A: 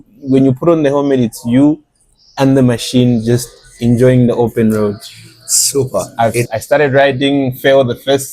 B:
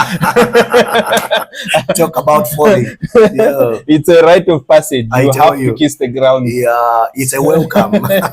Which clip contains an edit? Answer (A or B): A